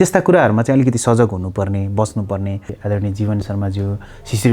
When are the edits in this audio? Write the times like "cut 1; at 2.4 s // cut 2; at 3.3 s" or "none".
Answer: cut 1; at 2.7 s